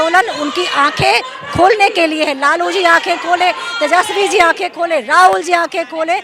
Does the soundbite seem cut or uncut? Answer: uncut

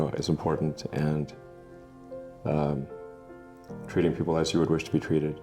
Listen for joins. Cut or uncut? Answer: uncut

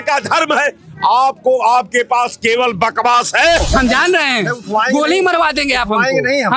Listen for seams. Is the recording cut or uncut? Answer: cut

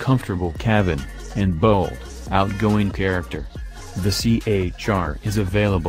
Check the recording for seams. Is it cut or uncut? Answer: uncut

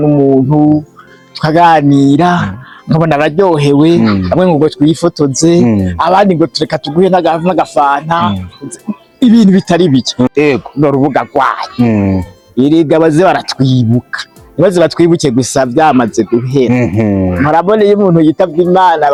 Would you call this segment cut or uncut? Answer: uncut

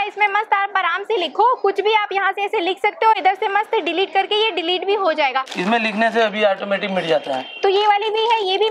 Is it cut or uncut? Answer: uncut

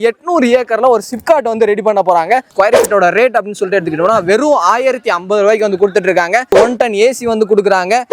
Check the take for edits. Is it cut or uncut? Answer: cut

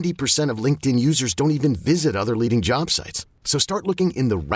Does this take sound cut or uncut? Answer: uncut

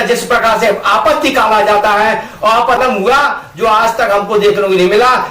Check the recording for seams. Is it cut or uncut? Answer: cut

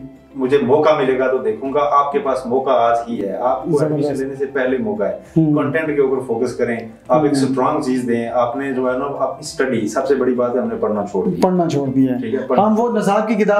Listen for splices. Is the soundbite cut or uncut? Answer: uncut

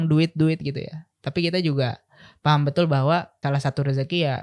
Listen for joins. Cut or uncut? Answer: cut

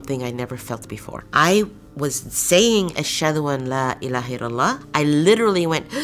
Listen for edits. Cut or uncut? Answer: cut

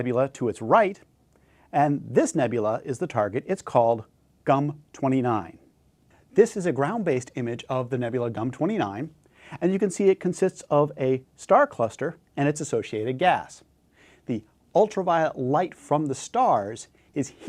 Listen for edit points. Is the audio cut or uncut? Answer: uncut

